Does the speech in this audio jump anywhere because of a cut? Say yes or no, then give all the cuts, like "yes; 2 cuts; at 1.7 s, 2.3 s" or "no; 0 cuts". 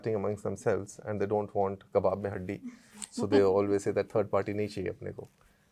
no; 0 cuts